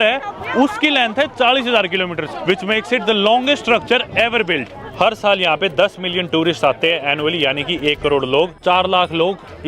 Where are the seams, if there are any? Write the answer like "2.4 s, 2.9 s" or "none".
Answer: 2.3 s, 4.7 s, 8.6 s